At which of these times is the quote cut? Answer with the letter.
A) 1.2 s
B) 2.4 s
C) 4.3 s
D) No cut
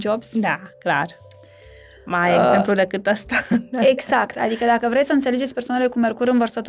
D